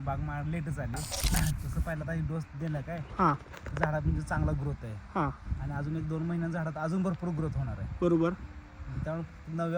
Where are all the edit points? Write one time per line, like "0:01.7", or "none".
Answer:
0:01.1